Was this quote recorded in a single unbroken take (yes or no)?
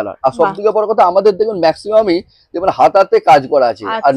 yes